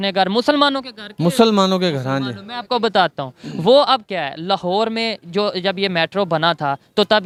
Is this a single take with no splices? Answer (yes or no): yes